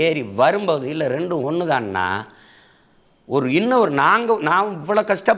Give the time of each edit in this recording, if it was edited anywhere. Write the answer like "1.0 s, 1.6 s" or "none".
none